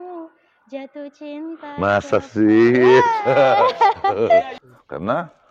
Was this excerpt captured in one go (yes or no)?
no